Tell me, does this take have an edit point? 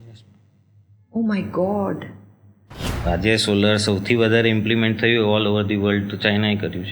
yes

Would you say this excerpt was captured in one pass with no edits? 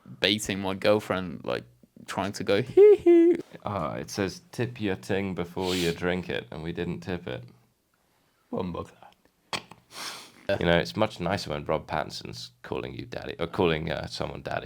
no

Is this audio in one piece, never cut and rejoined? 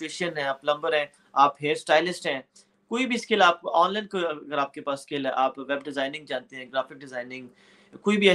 yes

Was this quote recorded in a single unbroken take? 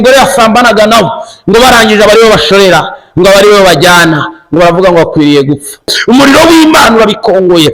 no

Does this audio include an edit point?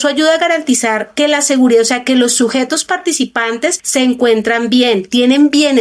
yes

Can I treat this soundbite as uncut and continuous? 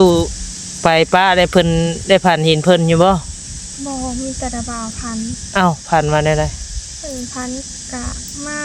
yes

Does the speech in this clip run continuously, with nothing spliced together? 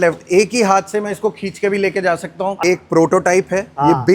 no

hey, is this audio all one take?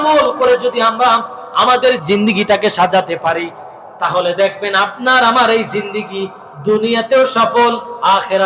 no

